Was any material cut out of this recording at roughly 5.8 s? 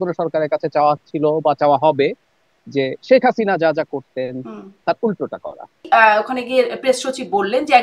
yes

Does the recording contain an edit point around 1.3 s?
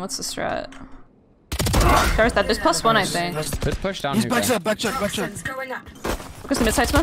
no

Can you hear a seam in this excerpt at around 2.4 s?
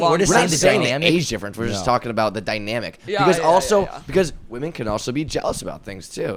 no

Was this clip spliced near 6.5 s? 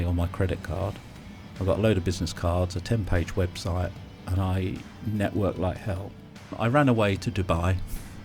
yes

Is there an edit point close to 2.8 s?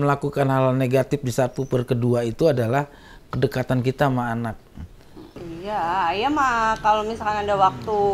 no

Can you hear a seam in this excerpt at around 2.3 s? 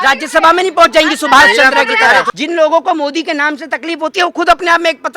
yes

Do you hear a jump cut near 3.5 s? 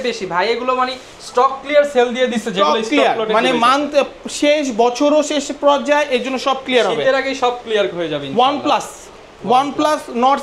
no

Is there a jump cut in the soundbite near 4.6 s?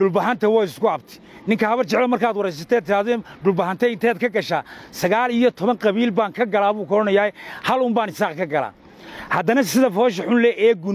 no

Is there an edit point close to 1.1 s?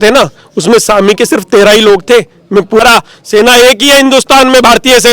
no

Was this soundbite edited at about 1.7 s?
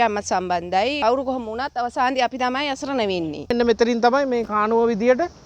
no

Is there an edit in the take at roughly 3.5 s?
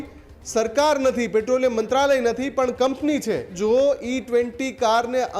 yes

